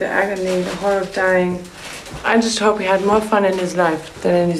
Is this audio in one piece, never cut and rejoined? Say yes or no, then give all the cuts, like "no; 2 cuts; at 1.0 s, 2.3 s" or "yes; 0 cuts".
no; 1 cut; at 2.3 s